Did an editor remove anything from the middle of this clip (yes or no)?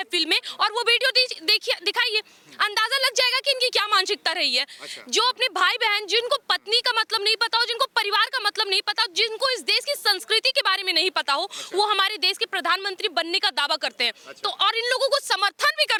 no